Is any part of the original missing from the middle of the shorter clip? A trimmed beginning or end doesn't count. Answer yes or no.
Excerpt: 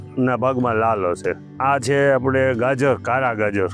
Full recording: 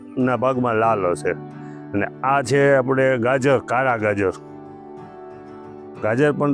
yes